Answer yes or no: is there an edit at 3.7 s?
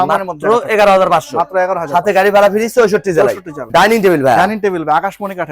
yes